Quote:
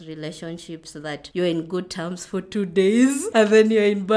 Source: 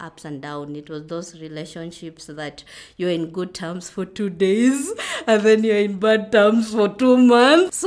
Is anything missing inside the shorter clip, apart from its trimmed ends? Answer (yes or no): yes